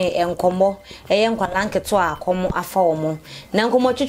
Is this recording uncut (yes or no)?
yes